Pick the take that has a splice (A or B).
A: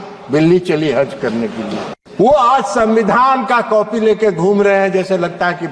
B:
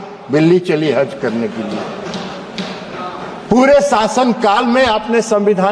A